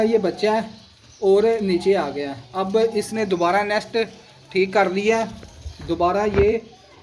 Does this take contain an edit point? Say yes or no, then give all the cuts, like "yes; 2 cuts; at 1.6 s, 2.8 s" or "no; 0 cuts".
no; 0 cuts